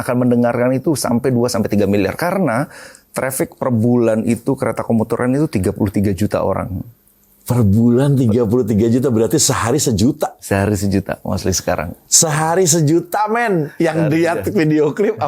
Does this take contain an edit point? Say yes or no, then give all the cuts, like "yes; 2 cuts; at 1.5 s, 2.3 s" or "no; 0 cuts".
no; 0 cuts